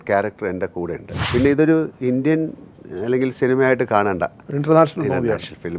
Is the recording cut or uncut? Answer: cut